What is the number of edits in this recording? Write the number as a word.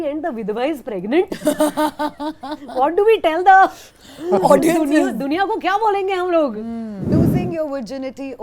one